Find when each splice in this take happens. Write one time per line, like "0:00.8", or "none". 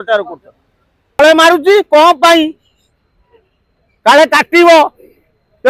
0:01.2